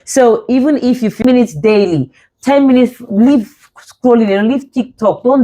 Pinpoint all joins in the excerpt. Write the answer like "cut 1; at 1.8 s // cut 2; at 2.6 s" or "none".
cut 1; at 1.2 s